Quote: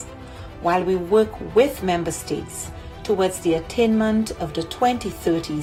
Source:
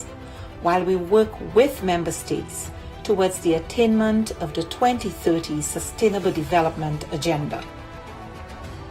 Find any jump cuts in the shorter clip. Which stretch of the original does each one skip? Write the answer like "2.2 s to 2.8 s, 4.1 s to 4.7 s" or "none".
none